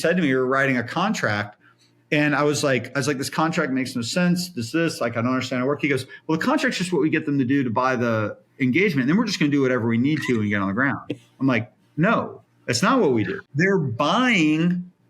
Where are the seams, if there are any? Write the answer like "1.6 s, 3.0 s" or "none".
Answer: 13.4 s